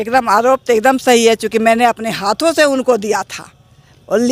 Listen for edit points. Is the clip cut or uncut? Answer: uncut